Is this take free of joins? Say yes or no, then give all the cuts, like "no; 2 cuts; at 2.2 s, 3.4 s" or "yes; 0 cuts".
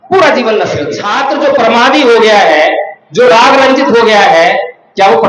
no; 1 cut; at 1.0 s